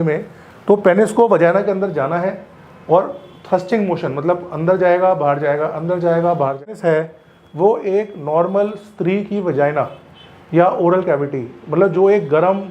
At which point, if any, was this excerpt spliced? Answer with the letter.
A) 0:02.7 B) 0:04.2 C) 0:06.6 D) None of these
C